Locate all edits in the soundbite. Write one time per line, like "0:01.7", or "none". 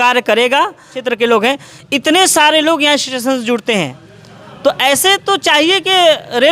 0:01.0